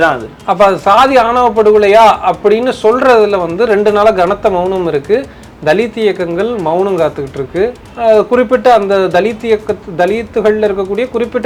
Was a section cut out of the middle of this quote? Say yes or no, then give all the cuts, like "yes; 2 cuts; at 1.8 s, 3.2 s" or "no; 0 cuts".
no; 0 cuts